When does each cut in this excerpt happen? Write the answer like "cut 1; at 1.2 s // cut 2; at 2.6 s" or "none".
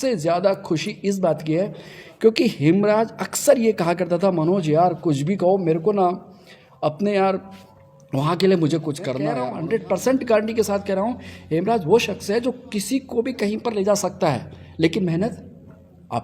cut 1; at 9.3 s